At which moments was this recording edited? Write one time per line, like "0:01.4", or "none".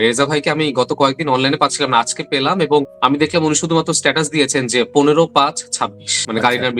0:02.9